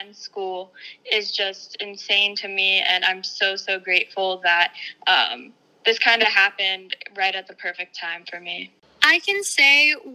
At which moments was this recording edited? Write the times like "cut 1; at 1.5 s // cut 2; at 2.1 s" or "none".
cut 1; at 8.8 s